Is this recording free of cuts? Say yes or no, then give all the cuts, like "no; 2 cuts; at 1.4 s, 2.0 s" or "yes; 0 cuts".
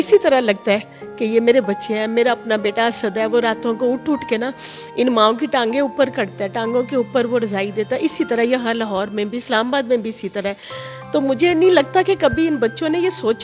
yes; 0 cuts